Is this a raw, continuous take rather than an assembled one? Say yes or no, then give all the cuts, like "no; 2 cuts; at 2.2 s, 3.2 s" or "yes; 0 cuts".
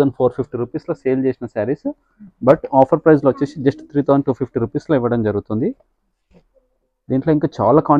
yes; 0 cuts